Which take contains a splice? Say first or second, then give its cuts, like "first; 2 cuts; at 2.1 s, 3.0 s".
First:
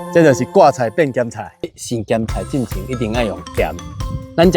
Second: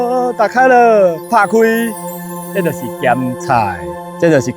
first; 1 cut; at 1.7 s